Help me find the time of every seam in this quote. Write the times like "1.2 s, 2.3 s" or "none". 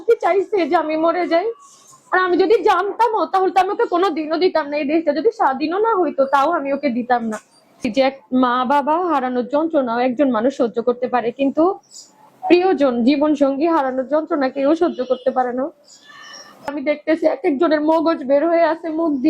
7.9 s, 16.7 s